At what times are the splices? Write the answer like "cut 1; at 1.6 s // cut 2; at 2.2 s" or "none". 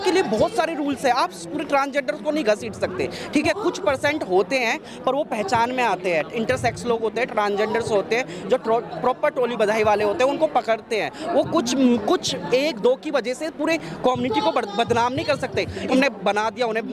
cut 1; at 15.8 s